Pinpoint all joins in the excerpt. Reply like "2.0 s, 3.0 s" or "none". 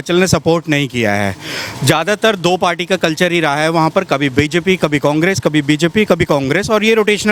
none